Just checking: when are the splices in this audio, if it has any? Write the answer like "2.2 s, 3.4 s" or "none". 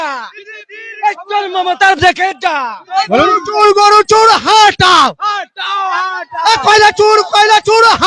2.8 s